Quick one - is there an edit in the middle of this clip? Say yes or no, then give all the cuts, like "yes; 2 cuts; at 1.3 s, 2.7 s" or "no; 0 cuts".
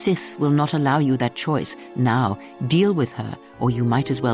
no; 0 cuts